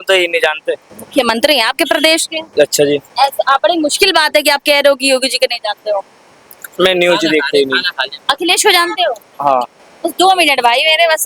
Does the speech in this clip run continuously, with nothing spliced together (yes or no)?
yes